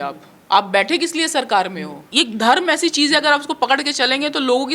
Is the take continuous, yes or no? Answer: no